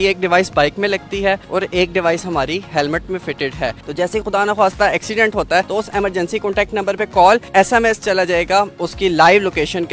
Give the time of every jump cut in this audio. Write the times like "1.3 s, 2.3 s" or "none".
3.8 s, 5.7 s, 7.5 s, 8.8 s